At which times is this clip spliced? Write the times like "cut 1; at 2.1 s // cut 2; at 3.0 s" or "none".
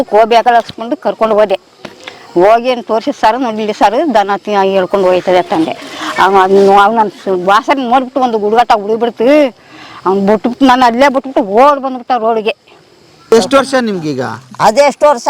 cut 1; at 13.3 s